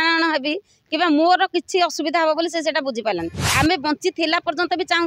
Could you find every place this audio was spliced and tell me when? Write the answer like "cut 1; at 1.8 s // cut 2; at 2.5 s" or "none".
cut 1; at 3.4 s